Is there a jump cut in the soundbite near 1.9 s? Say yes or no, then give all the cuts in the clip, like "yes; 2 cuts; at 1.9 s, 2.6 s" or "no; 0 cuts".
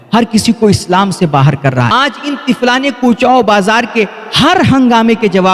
yes; 1 cut; at 1.9 s